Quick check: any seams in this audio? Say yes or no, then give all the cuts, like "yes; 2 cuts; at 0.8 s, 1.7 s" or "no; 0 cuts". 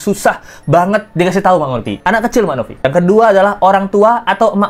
yes; 1 cut; at 2.0 s